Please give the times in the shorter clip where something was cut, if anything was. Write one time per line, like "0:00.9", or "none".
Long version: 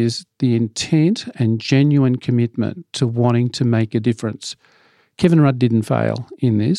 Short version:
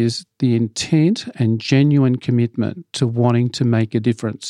none